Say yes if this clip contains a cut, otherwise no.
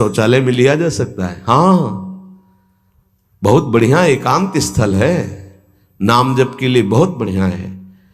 no